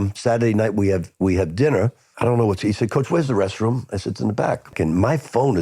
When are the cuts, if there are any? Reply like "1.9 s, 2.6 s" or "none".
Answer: 2.0 s, 4.7 s